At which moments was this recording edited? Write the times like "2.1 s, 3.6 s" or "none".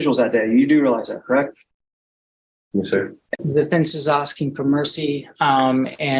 3.3 s